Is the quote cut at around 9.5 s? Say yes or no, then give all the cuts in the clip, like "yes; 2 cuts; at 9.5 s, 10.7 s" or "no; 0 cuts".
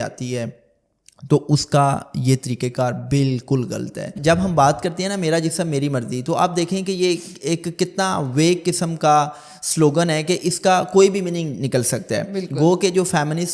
no; 1 cut; at 4.1 s